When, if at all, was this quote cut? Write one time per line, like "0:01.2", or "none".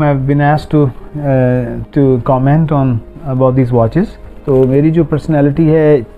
0:04.3